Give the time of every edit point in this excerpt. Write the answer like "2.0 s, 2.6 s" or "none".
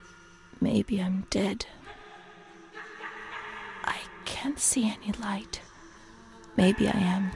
none